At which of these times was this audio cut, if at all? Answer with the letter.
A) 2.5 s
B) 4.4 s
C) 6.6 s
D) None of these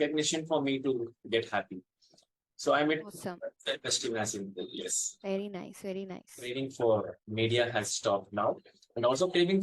C